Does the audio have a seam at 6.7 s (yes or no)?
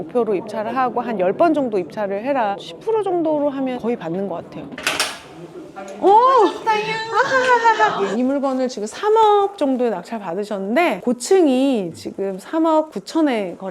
no